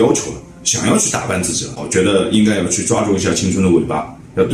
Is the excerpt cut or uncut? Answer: cut